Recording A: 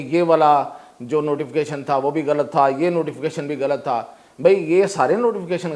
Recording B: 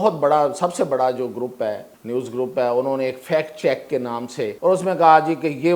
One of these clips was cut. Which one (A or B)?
B